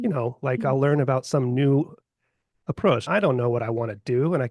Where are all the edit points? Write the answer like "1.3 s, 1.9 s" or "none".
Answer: 3.0 s